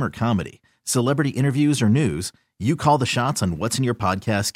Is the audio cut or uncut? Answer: uncut